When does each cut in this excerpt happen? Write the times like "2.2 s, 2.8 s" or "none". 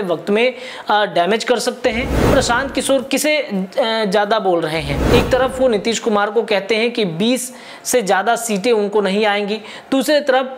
2.3 s, 4.9 s